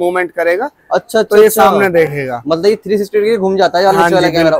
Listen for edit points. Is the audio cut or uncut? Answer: uncut